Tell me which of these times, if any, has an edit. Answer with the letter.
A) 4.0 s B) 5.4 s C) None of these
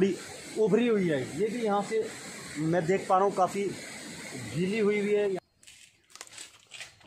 B